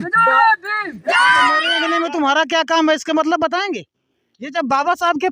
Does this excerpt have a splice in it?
yes; 1 cut; at 1.8 s

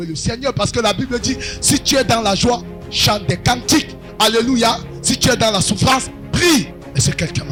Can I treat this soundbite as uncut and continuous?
yes; 0 cuts

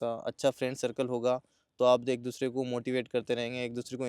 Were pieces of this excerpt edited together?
no; 0 cuts

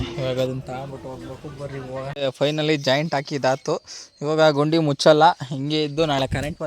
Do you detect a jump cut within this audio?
yes; 1 cut; at 2.1 s

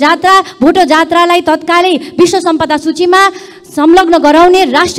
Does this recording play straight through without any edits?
yes; 0 cuts

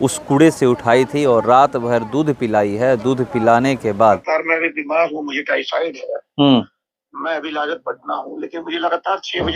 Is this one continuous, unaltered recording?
no; 1 cut; at 4.2 s

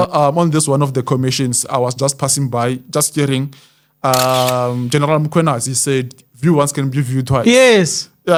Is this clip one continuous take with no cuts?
yes; 0 cuts

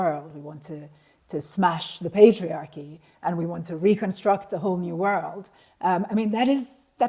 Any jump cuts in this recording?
no; 0 cuts

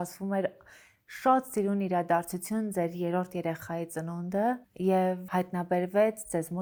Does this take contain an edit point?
no; 0 cuts

